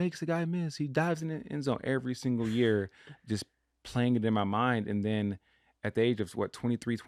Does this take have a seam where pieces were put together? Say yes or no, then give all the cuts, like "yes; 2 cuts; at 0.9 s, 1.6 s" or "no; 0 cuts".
no; 0 cuts